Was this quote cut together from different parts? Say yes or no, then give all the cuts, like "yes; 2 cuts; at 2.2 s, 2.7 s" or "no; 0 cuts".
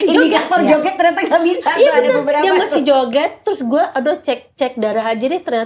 no; 0 cuts